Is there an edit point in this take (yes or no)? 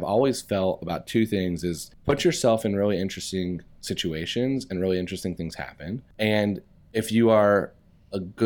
yes